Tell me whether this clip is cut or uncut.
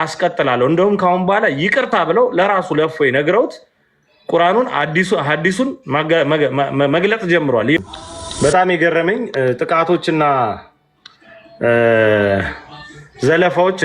cut